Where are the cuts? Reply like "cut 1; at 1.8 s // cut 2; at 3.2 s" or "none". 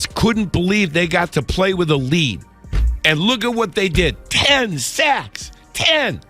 none